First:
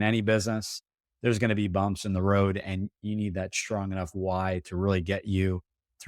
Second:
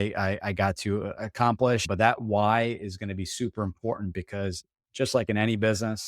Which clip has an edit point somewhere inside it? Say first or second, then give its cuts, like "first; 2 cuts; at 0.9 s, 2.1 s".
second; 1 cut; at 1.8 s